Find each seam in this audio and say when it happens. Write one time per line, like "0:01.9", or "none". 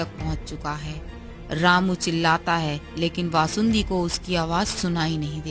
none